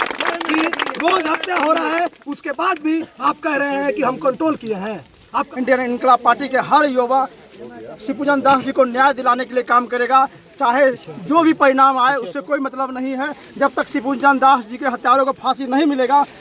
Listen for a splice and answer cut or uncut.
cut